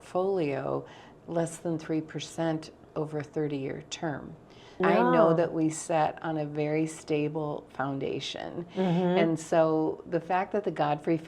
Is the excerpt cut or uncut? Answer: cut